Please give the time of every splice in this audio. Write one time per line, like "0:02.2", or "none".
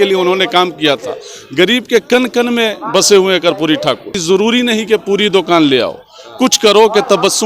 0:04.2